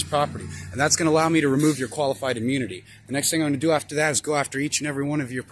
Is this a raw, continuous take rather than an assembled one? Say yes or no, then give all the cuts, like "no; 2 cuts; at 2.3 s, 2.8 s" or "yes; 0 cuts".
yes; 0 cuts